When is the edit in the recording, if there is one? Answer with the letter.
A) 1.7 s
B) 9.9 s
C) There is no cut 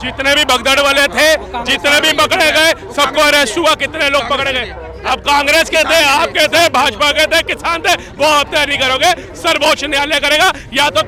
C